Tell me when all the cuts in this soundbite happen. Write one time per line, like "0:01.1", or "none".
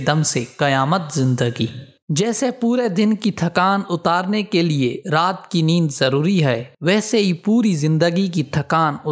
none